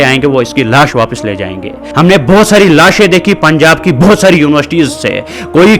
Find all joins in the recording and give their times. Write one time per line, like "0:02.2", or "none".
0:01.8